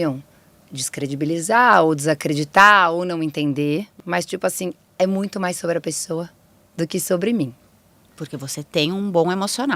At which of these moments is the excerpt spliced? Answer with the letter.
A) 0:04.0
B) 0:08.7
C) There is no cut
A